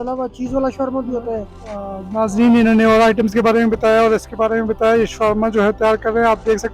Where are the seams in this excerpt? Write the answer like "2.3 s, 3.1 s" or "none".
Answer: 1.6 s